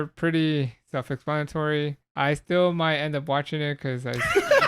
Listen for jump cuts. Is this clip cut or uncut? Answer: cut